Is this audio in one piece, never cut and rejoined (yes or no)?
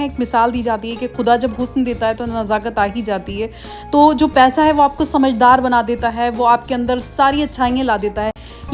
yes